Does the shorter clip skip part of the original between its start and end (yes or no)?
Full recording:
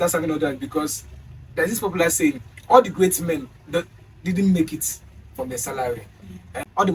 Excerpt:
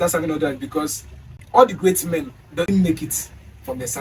yes